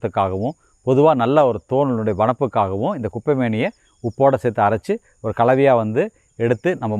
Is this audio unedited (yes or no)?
yes